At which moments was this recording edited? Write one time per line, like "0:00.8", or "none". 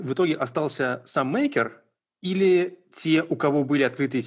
none